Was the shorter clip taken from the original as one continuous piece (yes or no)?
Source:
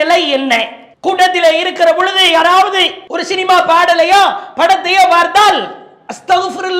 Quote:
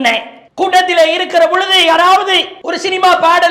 yes